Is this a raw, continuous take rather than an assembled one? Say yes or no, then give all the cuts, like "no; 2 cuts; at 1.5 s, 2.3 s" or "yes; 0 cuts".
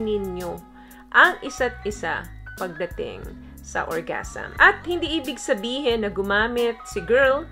no; 1 cut; at 4.5 s